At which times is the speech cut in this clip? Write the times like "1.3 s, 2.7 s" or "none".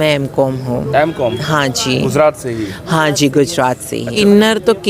4.0 s